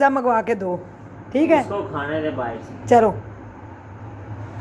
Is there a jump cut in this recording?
no; 0 cuts

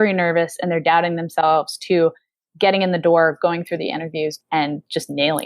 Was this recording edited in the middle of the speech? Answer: yes; 1 cut; at 4.3 s

